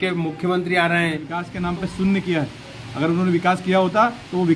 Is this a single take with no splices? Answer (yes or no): no